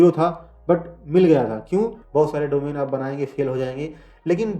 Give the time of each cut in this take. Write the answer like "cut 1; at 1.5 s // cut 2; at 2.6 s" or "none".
cut 1; at 2.0 s